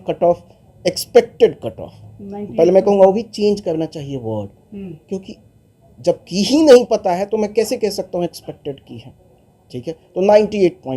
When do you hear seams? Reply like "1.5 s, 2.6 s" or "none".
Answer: none